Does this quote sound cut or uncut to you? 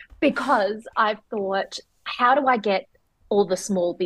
uncut